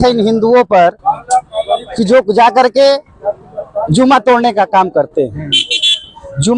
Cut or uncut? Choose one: uncut